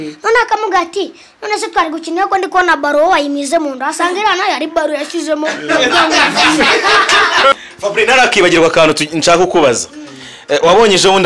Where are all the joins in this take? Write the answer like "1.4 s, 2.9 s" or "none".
7.5 s

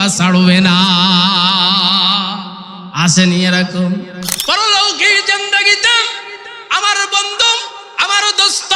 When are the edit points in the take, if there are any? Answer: 4.2 s

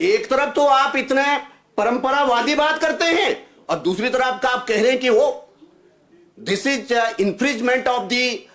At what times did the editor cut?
none

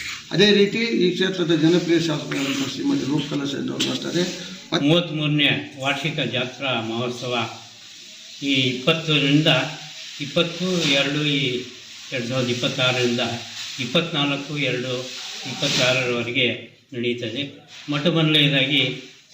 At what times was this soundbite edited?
4.8 s

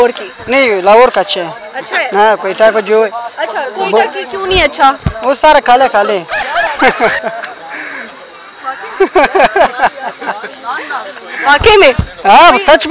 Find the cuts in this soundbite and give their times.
none

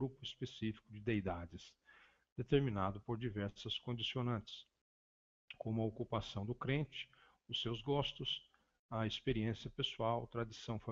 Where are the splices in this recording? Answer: none

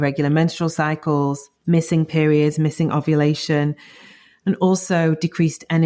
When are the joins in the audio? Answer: 1.5 s

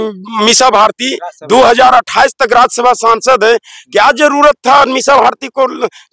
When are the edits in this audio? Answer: none

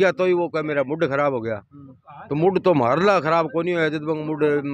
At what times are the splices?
none

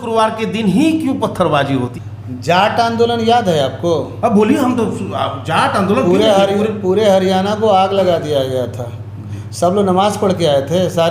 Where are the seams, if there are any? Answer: 1.9 s

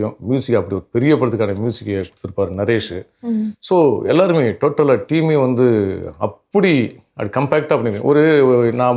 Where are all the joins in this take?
none

